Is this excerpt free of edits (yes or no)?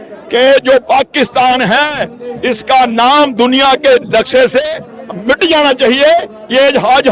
yes